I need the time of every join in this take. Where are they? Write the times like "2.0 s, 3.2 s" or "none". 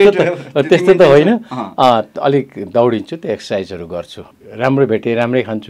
4.2 s